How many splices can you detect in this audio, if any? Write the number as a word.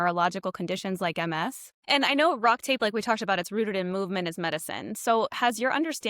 one